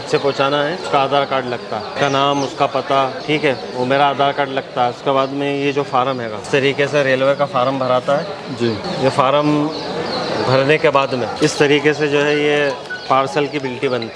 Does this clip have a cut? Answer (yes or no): yes